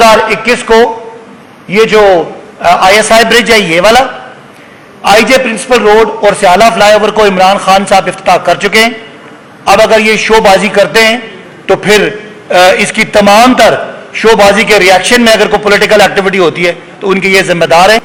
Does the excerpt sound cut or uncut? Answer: uncut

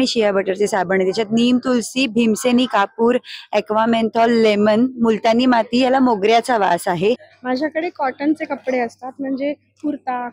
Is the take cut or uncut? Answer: cut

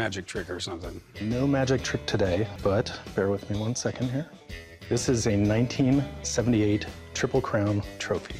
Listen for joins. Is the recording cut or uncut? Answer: uncut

